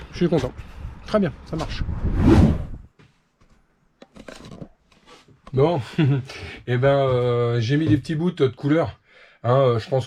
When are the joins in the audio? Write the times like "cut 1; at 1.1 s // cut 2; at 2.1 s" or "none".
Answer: none